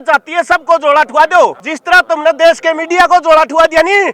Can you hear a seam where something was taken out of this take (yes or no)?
yes